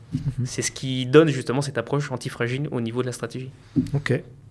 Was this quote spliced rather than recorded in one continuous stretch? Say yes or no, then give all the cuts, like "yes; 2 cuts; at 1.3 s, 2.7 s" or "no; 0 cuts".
no; 0 cuts